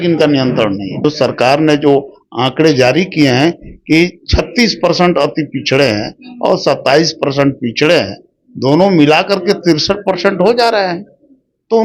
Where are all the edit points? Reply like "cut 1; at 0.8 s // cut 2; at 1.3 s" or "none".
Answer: cut 1; at 1.0 s